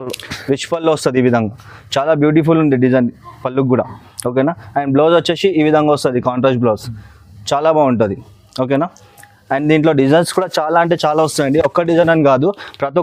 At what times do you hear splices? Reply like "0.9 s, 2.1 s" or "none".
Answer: none